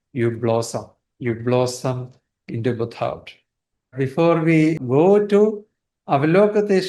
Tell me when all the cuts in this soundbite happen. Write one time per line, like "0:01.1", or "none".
0:03.9
0:04.8